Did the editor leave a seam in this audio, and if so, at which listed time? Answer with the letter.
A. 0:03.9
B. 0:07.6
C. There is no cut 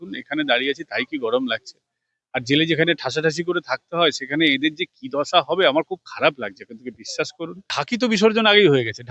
B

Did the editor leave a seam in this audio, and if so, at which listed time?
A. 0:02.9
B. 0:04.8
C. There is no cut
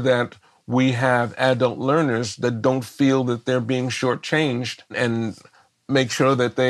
C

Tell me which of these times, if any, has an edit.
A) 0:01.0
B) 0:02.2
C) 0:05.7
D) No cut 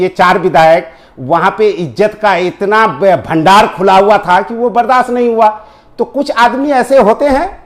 D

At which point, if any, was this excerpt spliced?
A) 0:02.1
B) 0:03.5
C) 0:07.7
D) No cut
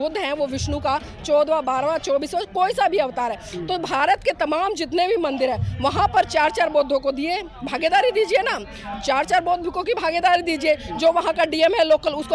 D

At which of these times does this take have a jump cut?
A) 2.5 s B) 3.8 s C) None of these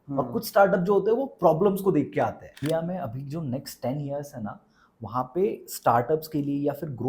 A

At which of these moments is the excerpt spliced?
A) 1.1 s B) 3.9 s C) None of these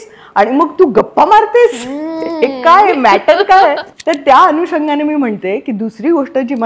B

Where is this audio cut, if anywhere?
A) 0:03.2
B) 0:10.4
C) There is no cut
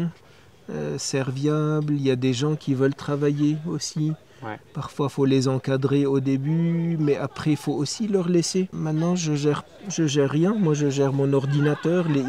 C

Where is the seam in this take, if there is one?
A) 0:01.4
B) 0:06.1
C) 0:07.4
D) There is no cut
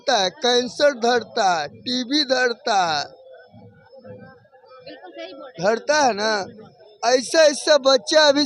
D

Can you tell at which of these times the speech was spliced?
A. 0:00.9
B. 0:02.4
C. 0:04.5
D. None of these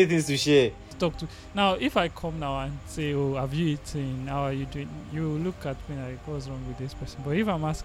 A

